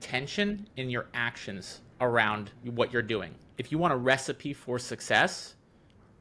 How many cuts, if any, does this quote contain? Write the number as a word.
two